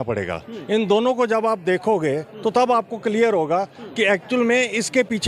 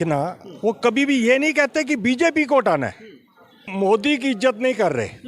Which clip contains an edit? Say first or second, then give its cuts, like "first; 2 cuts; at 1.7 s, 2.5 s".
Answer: second; 1 cut; at 3.7 s